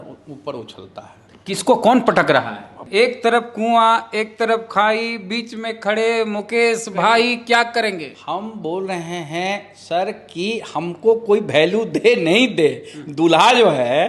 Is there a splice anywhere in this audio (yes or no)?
yes